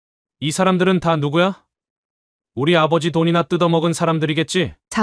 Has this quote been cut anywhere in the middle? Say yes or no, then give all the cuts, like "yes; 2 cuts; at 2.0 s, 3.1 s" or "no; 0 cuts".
no; 0 cuts